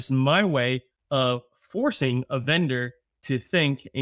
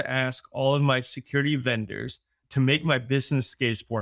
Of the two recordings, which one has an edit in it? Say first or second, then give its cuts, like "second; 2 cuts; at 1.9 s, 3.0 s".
second; 1 cut; at 2.4 s